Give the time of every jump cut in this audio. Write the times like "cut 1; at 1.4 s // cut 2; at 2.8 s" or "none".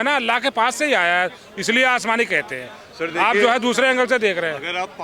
none